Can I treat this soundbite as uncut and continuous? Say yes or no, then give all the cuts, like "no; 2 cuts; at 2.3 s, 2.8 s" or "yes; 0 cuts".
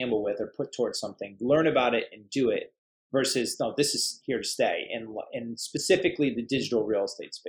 yes; 0 cuts